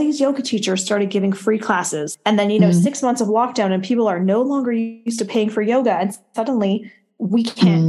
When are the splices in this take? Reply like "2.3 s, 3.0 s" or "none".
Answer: 2.1 s